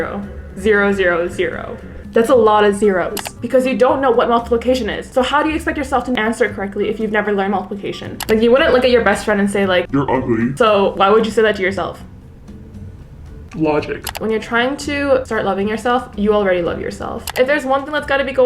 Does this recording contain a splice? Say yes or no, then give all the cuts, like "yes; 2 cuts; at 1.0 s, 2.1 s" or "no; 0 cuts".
yes; 4 cuts; at 3.3 s, 8.2 s, 14.1 s, 17.3 s